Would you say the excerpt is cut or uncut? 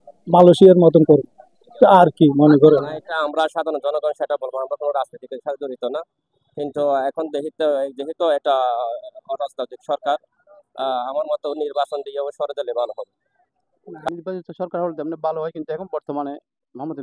cut